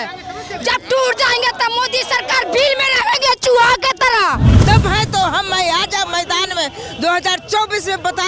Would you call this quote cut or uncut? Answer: cut